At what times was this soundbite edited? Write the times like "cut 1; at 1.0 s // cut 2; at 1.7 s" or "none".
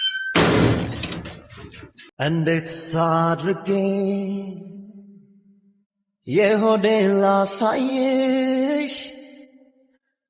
cut 1; at 2.3 s